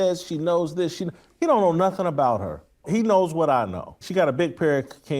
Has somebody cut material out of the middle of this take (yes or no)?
yes